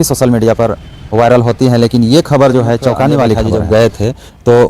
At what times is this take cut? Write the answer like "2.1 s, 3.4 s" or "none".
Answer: 3.5 s